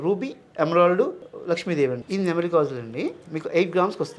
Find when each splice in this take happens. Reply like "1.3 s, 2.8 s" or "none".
2.0 s, 3.3 s